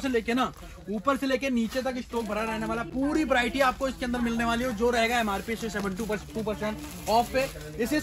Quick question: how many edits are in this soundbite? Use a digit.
0